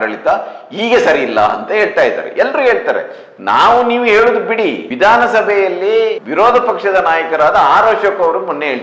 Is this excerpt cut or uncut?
cut